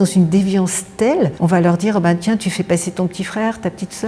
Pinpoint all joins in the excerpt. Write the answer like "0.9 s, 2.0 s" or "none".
1.3 s